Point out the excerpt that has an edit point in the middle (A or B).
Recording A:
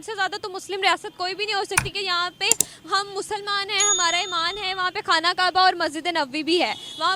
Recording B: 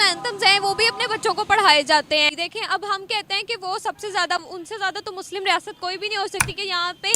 B